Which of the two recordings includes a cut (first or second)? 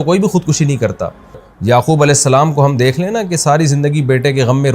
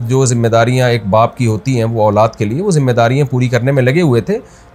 first